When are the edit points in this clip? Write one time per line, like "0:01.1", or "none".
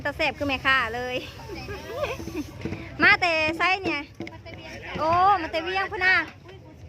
none